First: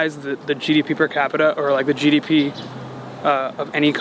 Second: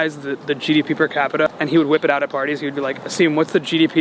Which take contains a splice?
second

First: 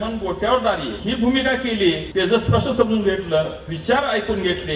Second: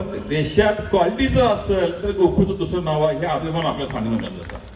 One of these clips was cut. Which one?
first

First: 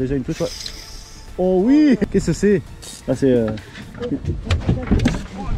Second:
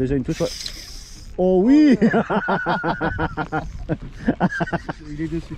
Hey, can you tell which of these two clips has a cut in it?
first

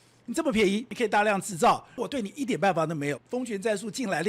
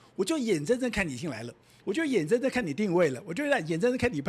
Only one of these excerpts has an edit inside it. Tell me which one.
first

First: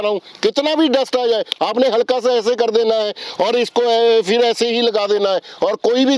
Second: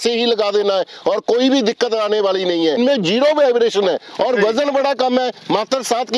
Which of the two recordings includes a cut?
second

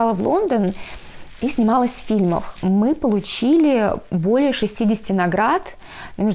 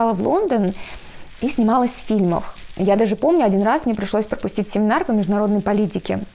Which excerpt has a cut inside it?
first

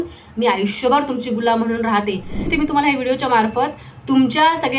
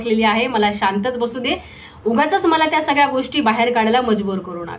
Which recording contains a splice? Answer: first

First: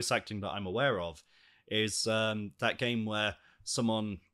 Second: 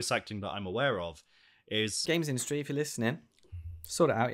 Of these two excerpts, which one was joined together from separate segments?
second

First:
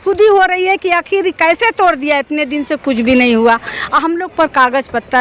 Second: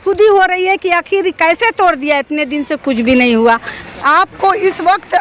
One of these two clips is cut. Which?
second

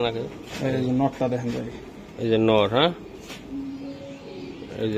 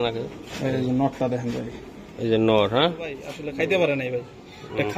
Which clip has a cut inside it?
second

